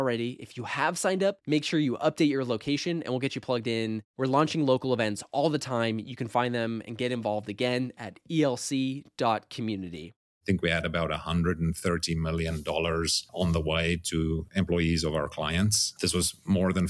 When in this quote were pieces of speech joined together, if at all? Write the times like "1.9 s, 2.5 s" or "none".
10.3 s, 15.9 s